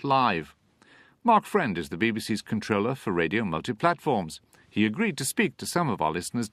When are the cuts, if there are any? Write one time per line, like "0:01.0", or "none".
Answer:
none